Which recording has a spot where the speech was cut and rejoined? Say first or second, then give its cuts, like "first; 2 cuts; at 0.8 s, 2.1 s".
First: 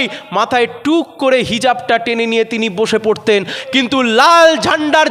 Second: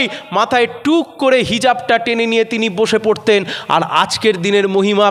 first; 1 cut; at 3.6 s